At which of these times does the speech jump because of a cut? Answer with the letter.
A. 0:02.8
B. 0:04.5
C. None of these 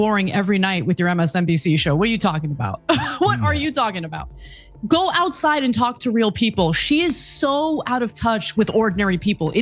C